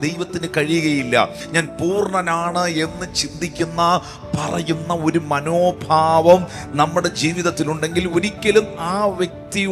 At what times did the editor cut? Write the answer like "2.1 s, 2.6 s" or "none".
1.4 s